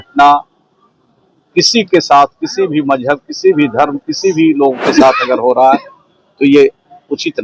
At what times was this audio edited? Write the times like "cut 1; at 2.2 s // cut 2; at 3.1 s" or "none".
none